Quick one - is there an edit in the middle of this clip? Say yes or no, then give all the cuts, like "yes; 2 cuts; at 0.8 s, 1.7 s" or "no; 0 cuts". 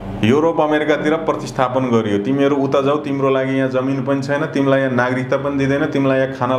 no; 0 cuts